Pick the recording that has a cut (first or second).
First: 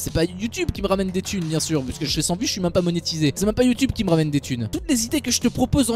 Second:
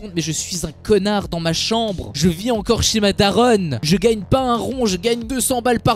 first